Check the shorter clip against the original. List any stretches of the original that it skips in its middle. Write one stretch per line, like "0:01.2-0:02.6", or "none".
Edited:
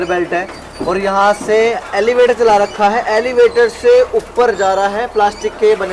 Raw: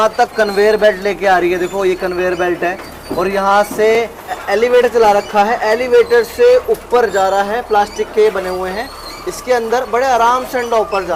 0:03.9-0:04.2